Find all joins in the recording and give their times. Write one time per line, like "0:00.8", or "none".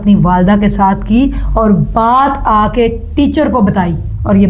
none